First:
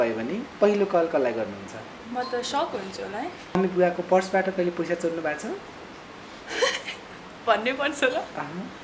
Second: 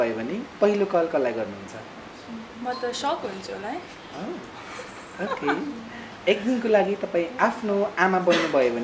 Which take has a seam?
first; 2 cuts; at 2.0 s, 3.6 s

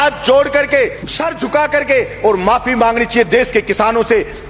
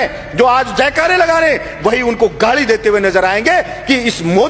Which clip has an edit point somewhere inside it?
first; 1 cut; at 1.0 s

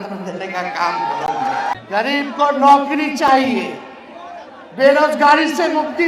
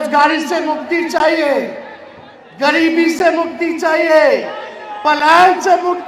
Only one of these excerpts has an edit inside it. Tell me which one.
first; 1 cut; at 1.7 s

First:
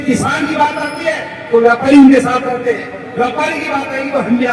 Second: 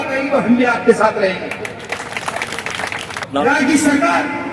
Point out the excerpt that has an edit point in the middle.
second; 1 cut; at 3.3 s

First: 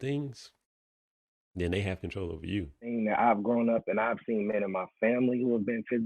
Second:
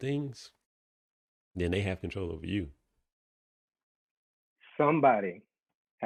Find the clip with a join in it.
first; 1 cut; at 2.9 s

